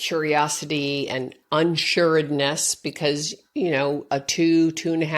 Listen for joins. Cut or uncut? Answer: uncut